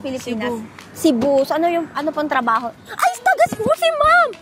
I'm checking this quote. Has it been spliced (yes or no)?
no